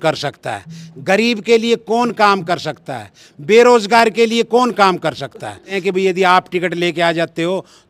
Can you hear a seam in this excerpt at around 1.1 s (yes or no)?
no